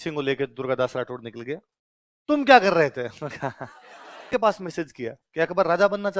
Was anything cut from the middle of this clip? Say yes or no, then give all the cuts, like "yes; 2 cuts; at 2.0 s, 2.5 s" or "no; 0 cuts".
yes; 1 cut; at 4.3 s